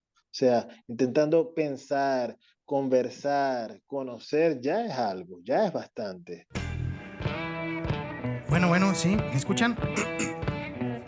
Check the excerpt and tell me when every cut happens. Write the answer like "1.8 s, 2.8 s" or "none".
6.4 s